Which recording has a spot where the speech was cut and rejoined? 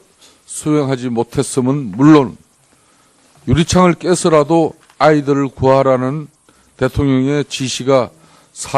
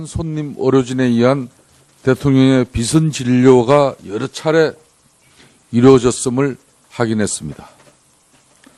first; 1 cut; at 1.5 s

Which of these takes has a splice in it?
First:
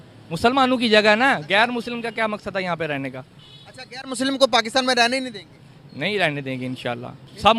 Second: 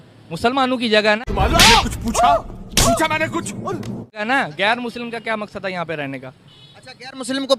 first; 1 cut; at 1.2 s

